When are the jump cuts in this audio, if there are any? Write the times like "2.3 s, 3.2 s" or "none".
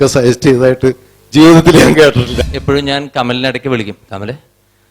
2.3 s